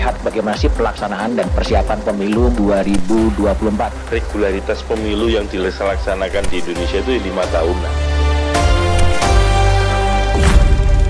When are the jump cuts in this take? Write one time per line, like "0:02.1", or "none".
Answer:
none

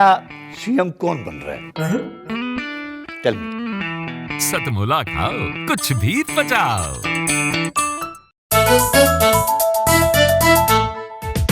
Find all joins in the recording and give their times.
0:08.4

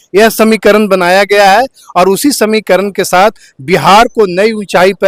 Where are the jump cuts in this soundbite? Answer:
none

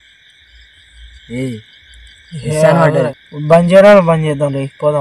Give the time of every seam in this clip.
0:03.1

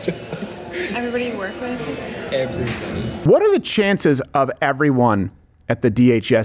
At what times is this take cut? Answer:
0:03.1

